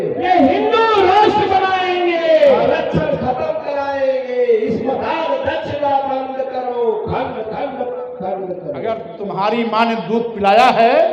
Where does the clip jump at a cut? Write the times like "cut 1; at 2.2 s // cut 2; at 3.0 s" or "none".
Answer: cut 1; at 9.1 s